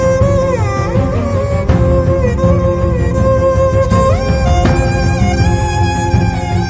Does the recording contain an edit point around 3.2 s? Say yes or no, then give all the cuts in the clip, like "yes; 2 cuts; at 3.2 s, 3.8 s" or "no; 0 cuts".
no; 0 cuts